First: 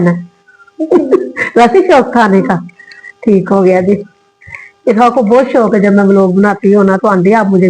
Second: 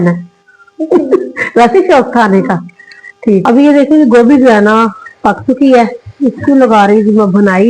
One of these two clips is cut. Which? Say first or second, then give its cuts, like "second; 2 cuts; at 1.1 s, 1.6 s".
second; 1 cut; at 3.4 s